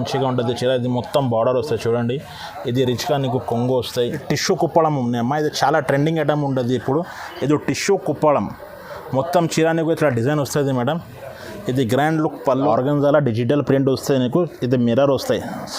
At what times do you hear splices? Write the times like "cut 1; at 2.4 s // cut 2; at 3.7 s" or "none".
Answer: cut 1; at 4.0 s // cut 2; at 12.7 s